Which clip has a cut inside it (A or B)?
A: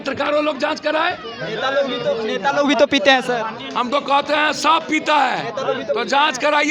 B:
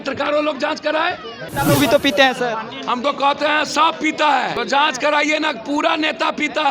B